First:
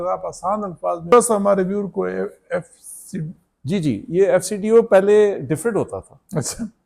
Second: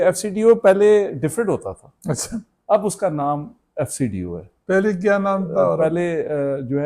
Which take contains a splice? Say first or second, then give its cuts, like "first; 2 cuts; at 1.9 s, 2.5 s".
first; 1 cut; at 1.1 s